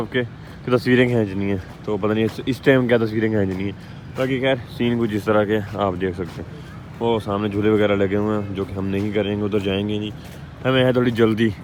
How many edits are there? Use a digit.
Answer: 0